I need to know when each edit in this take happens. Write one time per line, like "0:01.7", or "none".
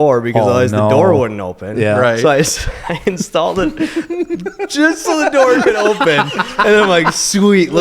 none